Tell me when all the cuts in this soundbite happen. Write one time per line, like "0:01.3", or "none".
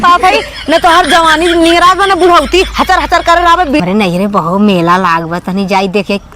0:03.8